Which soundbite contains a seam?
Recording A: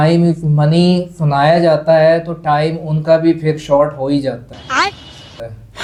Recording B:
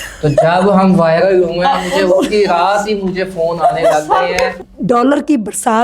B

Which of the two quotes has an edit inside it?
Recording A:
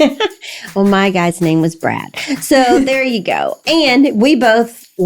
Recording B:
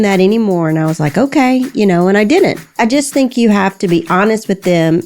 B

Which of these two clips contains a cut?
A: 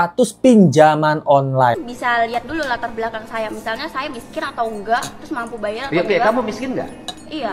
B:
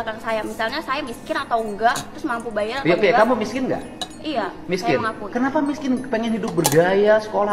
A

